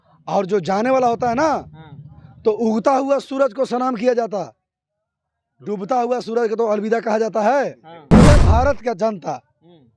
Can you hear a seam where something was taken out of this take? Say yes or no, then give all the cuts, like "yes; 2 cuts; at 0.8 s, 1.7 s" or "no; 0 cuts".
yes; 1 cut; at 8.2 s